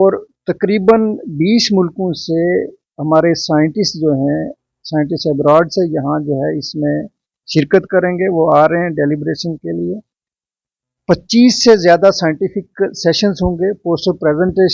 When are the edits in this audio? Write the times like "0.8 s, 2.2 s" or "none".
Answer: none

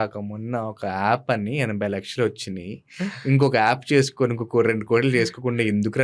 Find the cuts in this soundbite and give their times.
none

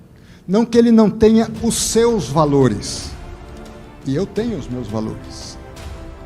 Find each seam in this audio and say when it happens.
5.4 s

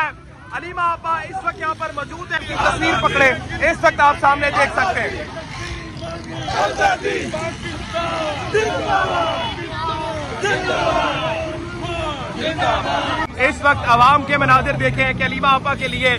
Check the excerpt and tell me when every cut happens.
2.4 s, 13.3 s

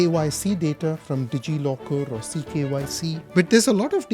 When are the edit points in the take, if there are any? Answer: 3.2 s

